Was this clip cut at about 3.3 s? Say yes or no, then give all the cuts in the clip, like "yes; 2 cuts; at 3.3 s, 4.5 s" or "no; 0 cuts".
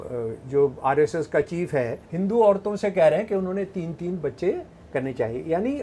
no; 1 cut; at 2.0 s